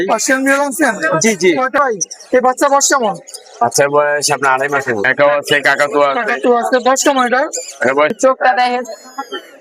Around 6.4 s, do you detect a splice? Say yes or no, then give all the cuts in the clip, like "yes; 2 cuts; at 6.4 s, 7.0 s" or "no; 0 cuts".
no; 3 cuts; at 1.8 s, 5.1 s, 8.1 s